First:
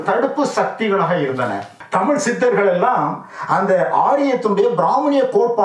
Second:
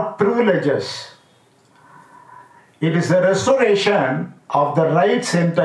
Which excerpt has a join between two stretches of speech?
first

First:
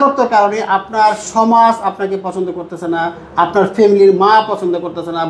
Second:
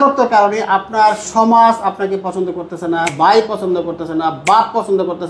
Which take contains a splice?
second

